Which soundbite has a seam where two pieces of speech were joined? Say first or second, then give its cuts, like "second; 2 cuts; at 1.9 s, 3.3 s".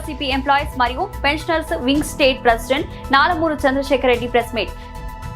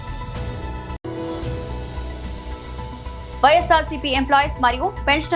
second; 2 cuts; at 1.0 s, 2.9 s